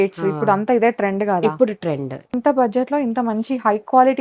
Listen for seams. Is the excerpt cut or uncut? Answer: cut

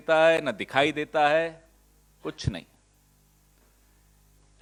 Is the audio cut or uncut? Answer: uncut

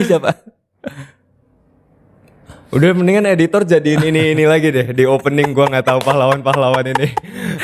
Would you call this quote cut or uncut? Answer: cut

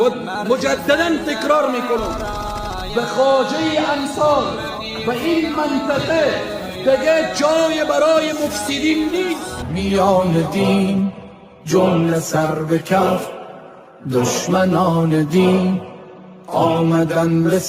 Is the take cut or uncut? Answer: cut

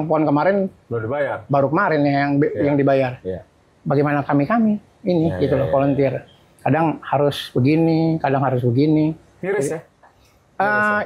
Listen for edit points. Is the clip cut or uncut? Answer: uncut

